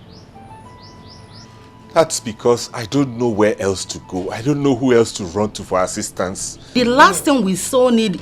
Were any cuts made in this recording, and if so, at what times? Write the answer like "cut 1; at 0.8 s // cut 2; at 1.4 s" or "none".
cut 1; at 6.7 s